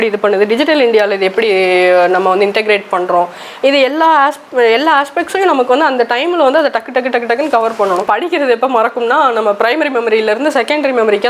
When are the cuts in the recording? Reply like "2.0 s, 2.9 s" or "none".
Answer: 8.0 s